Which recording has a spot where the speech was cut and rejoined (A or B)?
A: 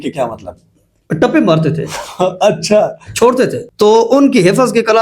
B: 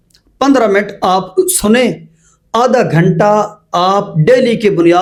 A